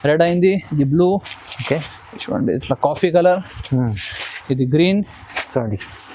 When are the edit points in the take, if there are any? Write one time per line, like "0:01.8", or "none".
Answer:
none